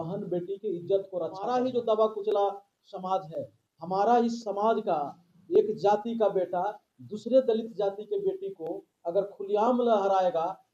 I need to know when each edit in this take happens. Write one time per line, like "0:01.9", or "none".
0:01.4